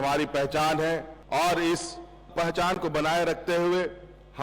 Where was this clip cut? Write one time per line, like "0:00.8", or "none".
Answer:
0:01.1
0:02.2